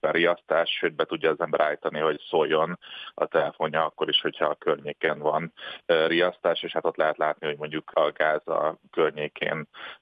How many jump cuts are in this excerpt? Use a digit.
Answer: 1